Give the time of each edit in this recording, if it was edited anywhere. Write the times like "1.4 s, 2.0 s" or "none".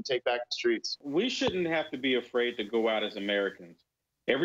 1.0 s